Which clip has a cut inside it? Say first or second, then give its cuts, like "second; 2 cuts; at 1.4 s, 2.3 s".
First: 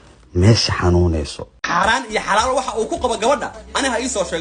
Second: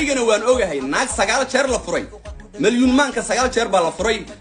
first; 1 cut; at 1.7 s